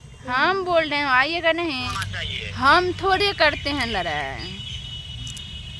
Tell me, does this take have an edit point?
yes; 1 cut; at 1.9 s

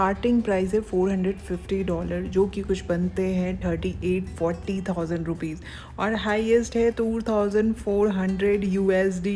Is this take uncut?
yes; 0 cuts

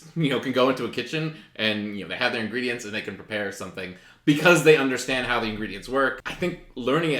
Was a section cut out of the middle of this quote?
yes; 1 cut; at 6.2 s

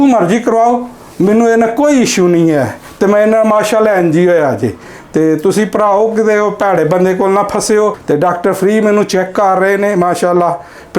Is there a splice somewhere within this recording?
yes; 1 cut; at 8.0 s

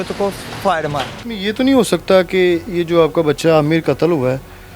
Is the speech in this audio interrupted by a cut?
yes; 1 cut; at 1.2 s

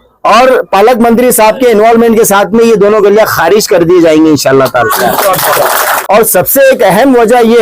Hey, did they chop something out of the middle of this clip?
yes; 1 cut; at 5.9 s

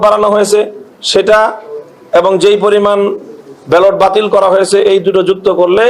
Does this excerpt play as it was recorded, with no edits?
yes; 0 cuts

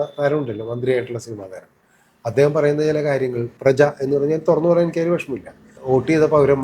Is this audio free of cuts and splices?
no; 1 cut; at 5.7 s

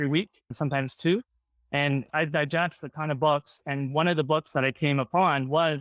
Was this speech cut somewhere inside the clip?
yes; 1 cut; at 2.1 s

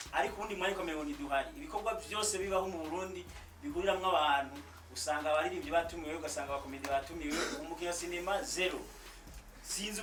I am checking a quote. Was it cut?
no; 0 cuts

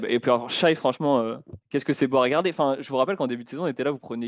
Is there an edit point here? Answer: no; 0 cuts

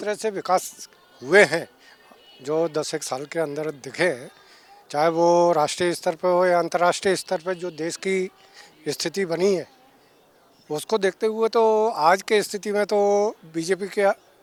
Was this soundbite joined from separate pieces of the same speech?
no; 0 cuts

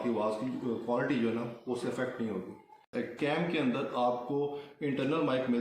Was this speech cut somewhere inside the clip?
yes; 1 cut; at 2.9 s

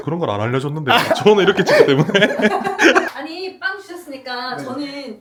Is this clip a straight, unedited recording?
yes; 0 cuts

